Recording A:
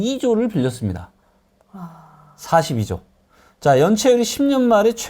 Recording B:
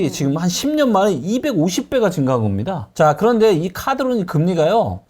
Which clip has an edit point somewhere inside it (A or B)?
B